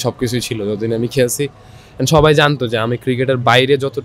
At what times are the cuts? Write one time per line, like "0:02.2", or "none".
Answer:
none